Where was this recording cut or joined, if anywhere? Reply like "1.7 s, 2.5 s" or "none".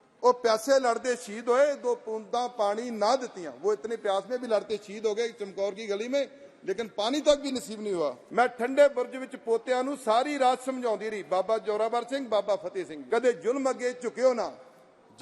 8.2 s, 13.0 s